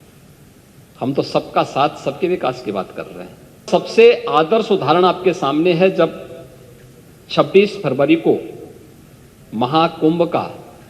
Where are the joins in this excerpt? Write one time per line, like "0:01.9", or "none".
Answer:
0:03.7